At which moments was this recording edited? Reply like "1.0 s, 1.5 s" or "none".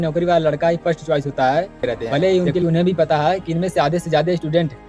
2.6 s

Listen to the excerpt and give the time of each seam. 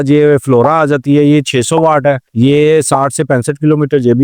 2.3 s

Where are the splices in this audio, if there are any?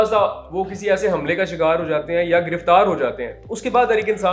none

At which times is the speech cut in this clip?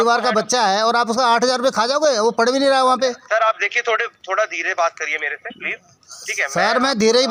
none

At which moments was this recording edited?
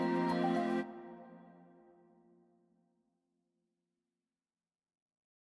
none

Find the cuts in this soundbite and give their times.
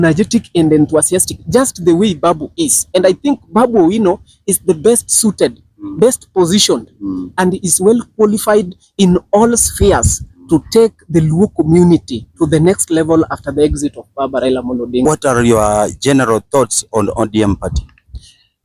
15.1 s

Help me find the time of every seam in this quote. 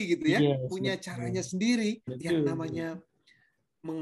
2.1 s

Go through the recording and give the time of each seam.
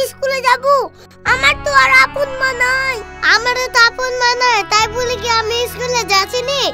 none

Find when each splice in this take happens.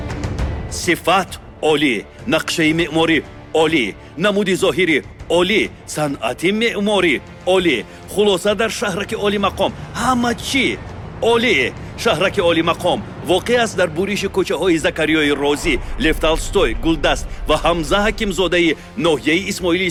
none

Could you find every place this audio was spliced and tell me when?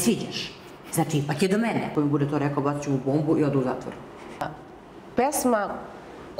1.9 s, 4.4 s

